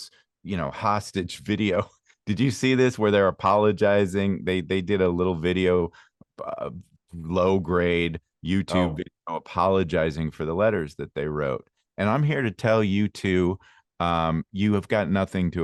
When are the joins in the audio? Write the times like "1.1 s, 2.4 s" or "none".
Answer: none